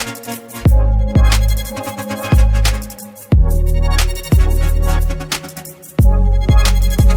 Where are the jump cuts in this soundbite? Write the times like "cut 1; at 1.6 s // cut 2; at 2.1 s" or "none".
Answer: none